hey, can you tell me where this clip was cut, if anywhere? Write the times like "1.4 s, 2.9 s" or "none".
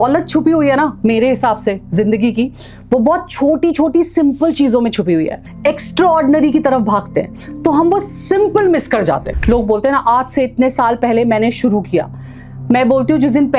5.4 s, 9.3 s